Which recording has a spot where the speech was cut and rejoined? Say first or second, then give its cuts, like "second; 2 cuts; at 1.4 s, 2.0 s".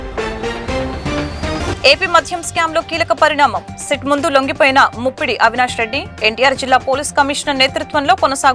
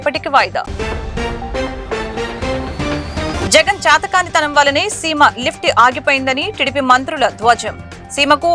first; 1 cut; at 1.6 s